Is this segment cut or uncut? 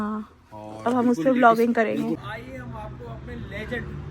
cut